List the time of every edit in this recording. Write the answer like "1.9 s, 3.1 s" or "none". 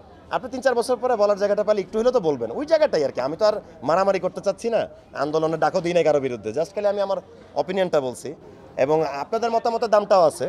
none